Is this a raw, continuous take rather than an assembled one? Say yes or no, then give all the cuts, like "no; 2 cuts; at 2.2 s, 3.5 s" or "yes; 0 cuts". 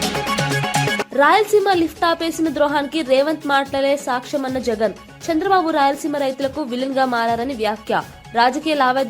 no; 1 cut; at 1.1 s